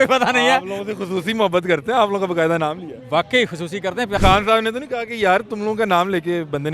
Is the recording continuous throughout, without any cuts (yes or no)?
no